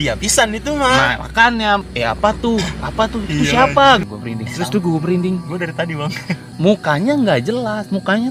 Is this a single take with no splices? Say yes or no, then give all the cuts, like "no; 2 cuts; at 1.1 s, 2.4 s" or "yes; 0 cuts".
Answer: no; 3 cuts; at 1.9 s, 4.0 s, 6.5 s